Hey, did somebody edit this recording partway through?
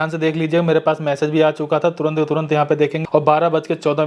yes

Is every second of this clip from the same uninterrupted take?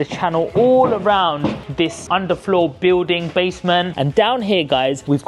no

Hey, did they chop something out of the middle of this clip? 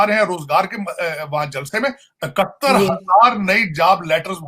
no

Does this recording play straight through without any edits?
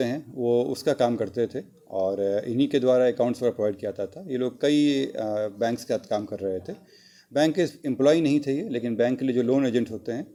yes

